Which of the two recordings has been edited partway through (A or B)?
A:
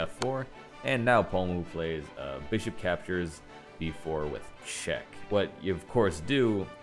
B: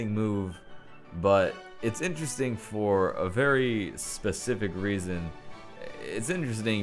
A